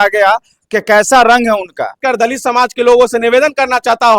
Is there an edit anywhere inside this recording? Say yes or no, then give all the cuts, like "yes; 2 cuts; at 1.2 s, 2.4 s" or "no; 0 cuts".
yes; 1 cut; at 2.0 s